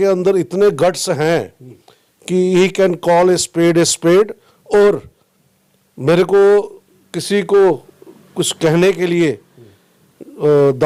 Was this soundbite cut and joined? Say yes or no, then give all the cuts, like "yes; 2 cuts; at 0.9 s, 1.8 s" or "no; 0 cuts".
no; 0 cuts